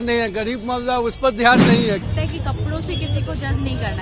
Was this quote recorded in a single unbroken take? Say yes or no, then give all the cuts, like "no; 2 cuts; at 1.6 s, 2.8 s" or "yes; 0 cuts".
no; 1 cut; at 2.0 s